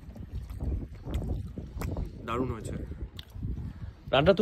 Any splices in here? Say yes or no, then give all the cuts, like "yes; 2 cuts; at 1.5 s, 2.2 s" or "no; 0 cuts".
no; 0 cuts